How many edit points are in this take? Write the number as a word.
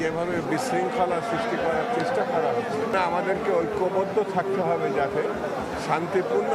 one